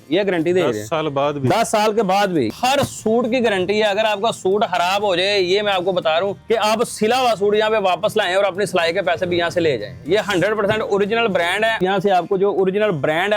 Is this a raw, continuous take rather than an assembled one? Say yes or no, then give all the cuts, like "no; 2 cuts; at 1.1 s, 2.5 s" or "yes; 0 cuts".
no; 3 cuts; at 2.5 s, 6.4 s, 11.8 s